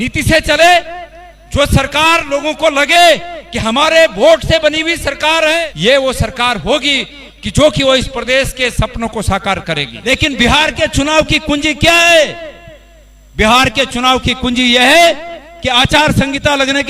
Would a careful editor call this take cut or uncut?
cut